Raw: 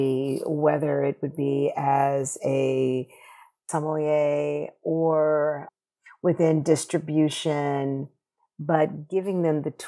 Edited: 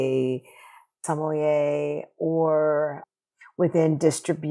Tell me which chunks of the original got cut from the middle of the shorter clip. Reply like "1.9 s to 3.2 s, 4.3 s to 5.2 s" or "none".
none